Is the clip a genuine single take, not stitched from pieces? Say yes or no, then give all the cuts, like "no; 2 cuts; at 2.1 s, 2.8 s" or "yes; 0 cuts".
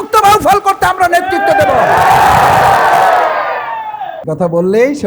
no; 1 cut; at 4.1 s